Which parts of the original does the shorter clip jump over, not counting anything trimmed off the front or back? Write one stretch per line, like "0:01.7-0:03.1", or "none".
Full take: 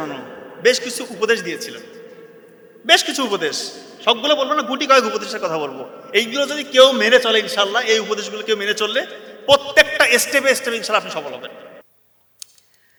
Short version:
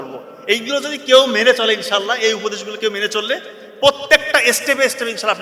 none